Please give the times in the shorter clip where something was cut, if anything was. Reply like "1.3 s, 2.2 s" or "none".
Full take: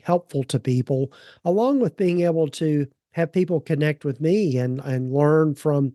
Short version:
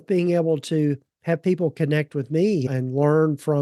2.7 s